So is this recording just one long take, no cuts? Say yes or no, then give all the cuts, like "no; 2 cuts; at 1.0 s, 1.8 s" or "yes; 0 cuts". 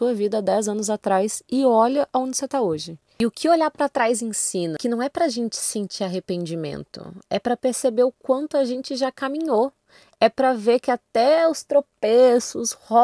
no; 2 cuts; at 3.0 s, 4.8 s